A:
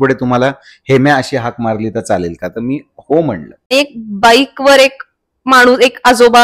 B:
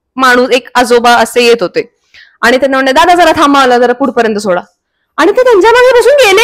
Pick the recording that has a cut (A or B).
A